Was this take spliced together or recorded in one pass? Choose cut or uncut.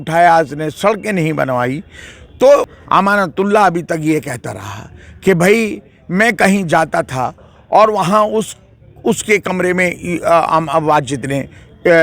cut